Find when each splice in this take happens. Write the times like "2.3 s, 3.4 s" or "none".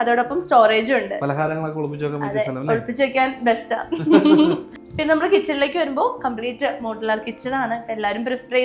none